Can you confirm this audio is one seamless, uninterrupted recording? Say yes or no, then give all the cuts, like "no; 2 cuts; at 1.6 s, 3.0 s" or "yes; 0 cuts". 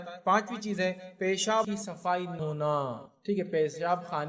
no; 1 cut; at 2.4 s